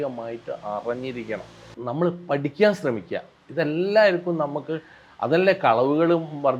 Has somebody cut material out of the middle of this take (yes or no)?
yes